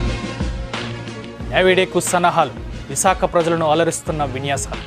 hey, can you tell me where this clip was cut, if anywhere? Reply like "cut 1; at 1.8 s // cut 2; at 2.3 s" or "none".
cut 1; at 1.3 s